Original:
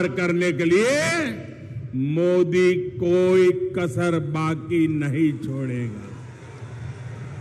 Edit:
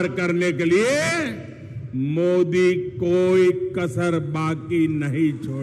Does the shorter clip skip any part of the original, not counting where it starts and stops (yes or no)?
no